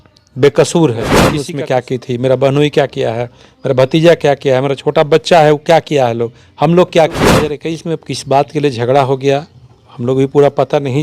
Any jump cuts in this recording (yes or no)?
yes